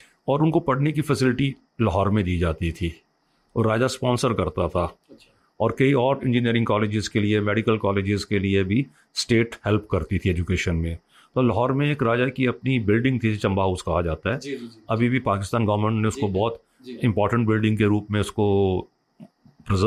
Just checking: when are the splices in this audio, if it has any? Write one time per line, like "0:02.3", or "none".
none